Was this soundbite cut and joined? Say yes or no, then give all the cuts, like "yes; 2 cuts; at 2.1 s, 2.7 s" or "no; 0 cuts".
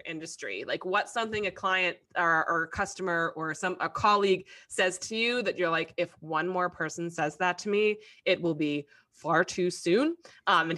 no; 0 cuts